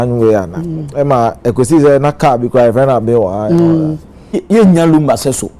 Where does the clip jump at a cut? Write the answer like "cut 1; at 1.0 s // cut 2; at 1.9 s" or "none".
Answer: cut 1; at 4.4 s